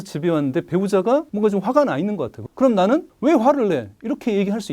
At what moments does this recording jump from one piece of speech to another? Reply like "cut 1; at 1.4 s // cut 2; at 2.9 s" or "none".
cut 1; at 1.3 s // cut 2; at 2.4 s // cut 3; at 3.1 s